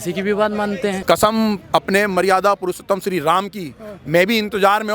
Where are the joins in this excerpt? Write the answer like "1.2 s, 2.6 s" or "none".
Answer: 1.0 s